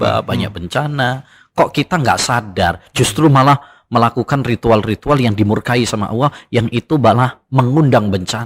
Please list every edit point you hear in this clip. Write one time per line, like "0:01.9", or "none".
none